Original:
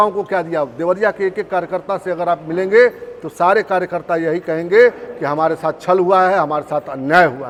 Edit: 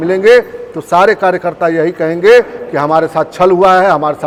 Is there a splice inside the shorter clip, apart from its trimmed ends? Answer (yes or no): no